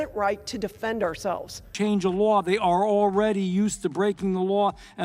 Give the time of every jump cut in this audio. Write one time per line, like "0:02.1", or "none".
0:01.7